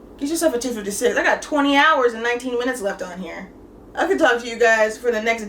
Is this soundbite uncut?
yes; 0 cuts

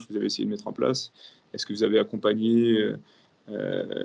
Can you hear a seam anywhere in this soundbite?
no; 0 cuts

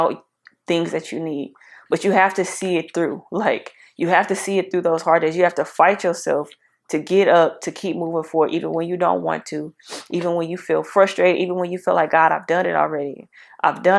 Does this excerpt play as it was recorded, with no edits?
yes; 0 cuts

